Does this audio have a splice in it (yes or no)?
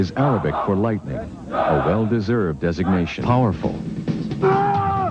no